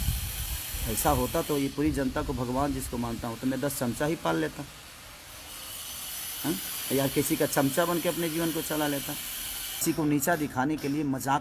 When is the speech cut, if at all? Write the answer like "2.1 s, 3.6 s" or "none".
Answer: 9.8 s